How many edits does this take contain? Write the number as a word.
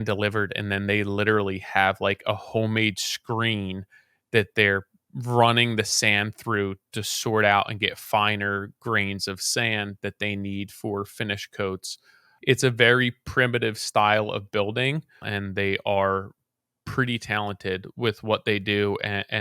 two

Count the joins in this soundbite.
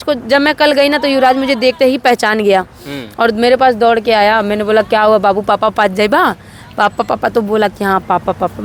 zero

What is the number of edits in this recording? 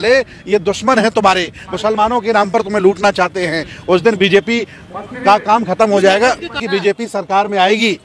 one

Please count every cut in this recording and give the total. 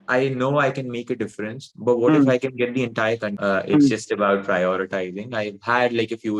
one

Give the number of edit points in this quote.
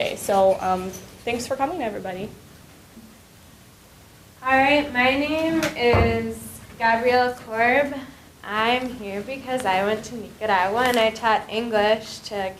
one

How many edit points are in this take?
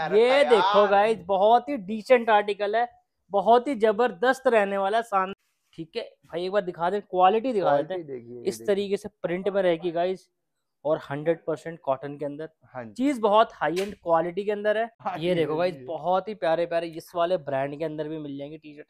two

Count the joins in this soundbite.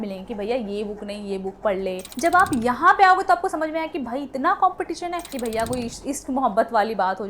two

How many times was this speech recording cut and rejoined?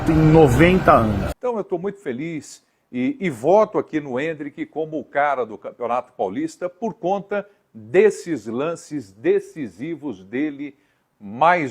one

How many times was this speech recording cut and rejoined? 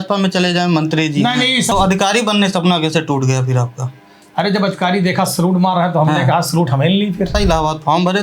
two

